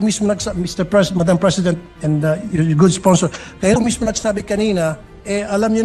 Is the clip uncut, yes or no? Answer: yes